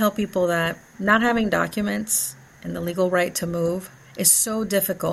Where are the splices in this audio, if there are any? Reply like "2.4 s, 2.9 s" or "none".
0.9 s, 4.0 s